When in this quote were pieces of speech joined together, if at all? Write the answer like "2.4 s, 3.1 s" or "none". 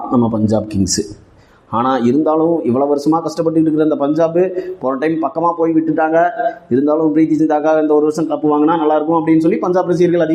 none